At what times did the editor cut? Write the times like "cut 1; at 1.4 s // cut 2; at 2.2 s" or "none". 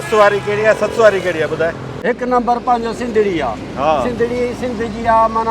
cut 1; at 1.9 s